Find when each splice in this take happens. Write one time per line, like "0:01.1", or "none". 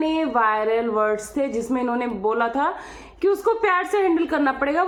none